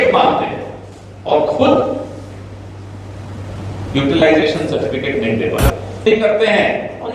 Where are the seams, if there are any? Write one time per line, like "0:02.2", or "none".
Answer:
0:06.0